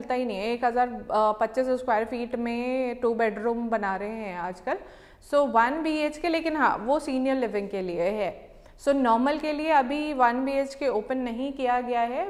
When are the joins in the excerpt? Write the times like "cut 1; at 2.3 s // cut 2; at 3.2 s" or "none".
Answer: none